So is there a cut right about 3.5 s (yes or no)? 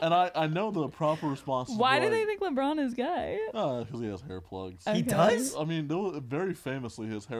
yes